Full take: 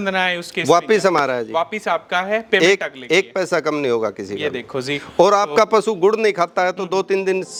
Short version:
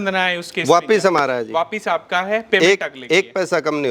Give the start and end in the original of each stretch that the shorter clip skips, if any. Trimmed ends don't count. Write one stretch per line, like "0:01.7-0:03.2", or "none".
none